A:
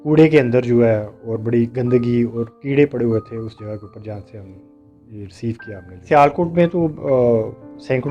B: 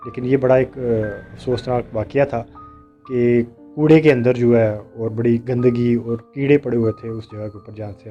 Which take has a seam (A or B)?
A